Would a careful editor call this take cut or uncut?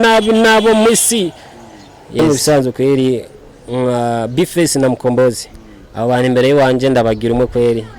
cut